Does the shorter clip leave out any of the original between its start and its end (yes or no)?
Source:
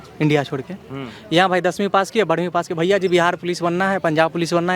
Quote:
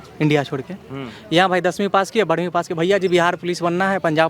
no